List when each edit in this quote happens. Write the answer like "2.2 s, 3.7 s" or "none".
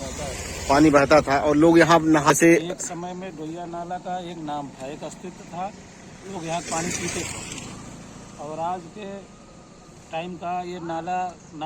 2.3 s